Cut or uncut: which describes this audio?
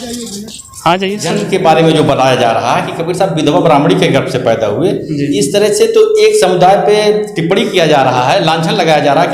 cut